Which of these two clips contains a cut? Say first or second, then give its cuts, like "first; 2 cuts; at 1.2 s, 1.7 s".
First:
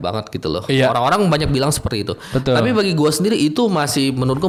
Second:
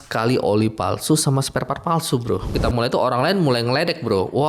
second; 1 cut; at 2.5 s